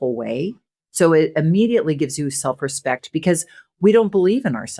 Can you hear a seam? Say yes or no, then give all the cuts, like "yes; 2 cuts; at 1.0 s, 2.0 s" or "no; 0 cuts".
no; 0 cuts